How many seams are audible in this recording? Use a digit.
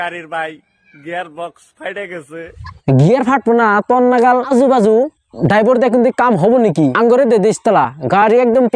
1